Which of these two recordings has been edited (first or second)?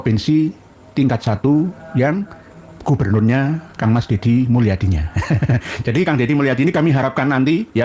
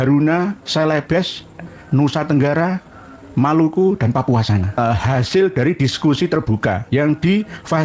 second